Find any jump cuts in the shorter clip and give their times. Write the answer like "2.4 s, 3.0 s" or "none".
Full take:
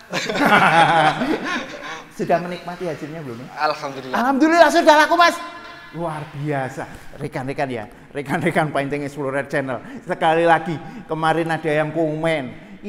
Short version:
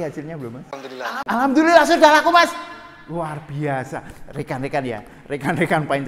none